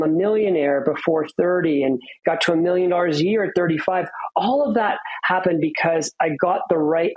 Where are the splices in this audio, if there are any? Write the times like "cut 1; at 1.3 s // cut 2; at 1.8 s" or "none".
none